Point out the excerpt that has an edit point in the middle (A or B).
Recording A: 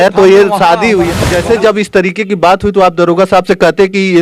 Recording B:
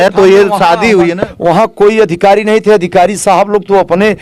A